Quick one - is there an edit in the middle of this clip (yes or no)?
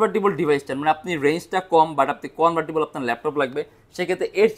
no